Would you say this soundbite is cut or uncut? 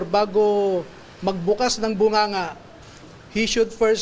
uncut